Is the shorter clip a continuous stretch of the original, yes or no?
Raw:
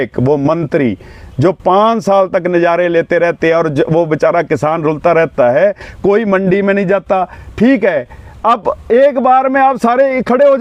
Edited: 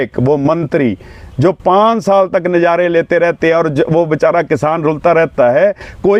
yes